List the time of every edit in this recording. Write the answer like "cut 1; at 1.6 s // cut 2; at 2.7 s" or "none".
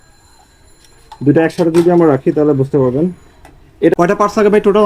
cut 1; at 3.9 s